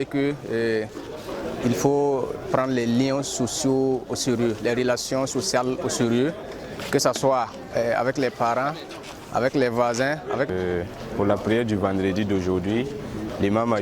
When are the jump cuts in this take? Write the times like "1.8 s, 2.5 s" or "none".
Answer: 10.5 s